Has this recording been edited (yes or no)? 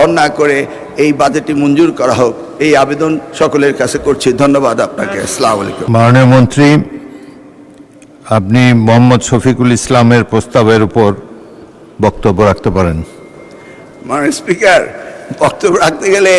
no